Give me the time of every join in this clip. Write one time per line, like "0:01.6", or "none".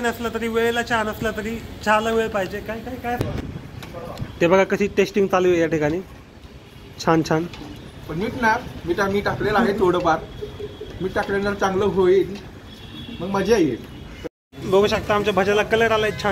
0:03.2
0:14.5